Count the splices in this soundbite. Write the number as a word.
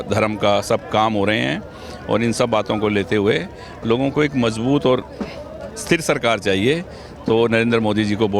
zero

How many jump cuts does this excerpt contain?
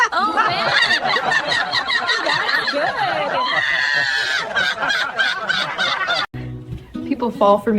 one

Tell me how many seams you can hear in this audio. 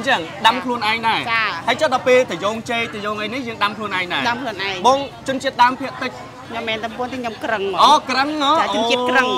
one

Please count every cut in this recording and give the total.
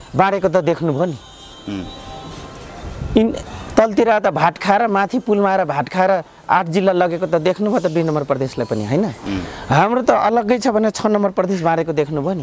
zero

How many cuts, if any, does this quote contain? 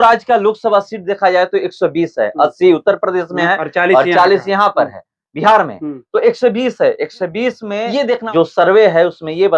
one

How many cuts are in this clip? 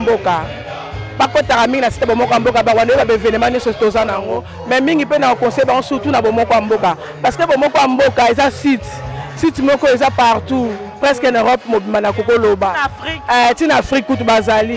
zero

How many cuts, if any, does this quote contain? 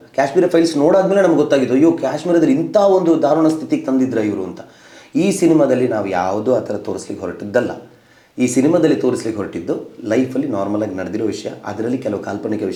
zero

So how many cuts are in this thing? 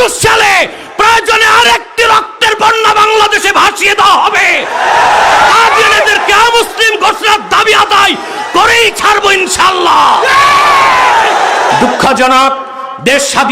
one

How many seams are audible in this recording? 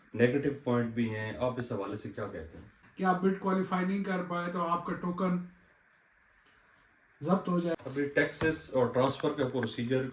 two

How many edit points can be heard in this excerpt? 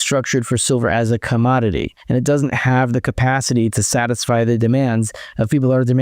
one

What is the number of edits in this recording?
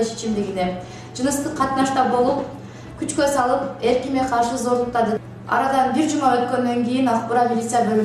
one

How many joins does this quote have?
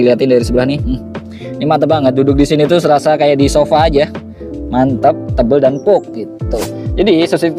one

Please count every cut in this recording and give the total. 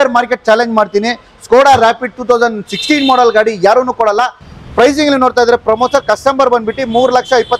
one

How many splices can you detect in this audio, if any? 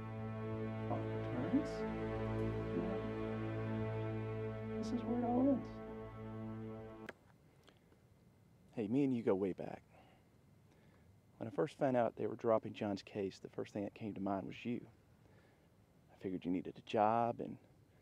one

